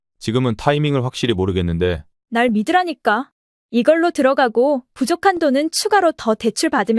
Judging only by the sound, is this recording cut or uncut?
cut